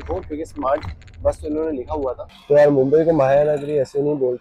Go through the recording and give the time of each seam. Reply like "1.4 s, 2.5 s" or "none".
2.3 s